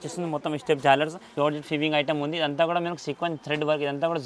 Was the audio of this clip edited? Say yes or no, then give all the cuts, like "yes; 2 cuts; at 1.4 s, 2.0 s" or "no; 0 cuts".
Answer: yes; 1 cut; at 1.2 s